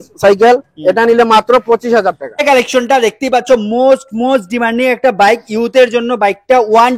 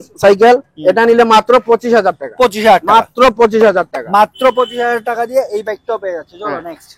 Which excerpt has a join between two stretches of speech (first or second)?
first